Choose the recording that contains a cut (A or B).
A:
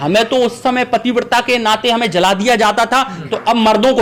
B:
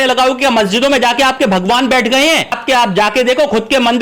B